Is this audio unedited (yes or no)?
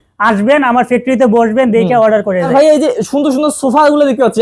no